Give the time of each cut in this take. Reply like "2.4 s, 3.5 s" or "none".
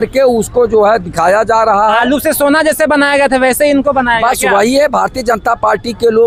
none